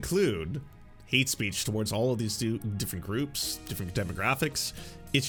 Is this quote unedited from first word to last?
yes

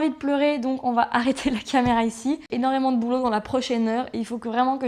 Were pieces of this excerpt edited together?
no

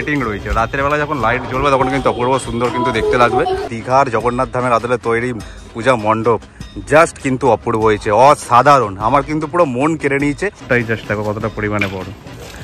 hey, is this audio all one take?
no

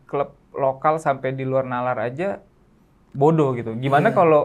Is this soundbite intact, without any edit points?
yes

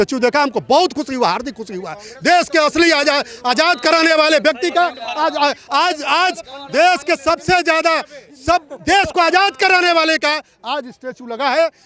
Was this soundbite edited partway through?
no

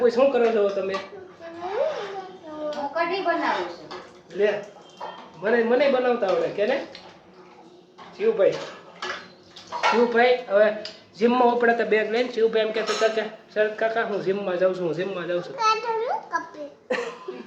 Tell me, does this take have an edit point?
no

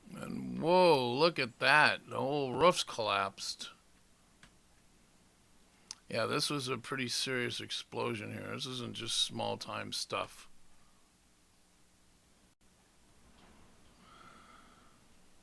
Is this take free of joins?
yes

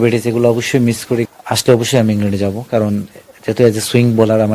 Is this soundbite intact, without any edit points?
no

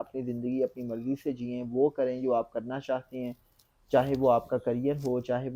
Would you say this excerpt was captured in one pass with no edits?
yes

